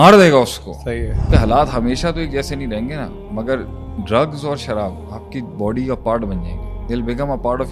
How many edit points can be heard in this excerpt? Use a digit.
1